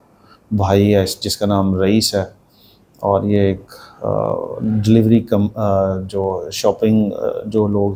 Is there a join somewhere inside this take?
no; 0 cuts

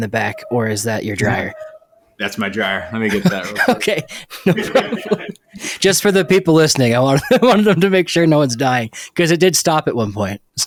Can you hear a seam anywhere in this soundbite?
no; 0 cuts

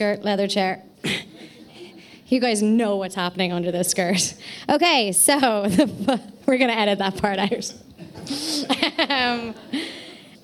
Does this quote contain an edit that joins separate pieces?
no; 0 cuts

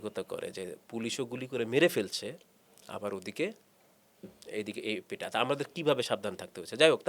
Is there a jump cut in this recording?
no; 0 cuts

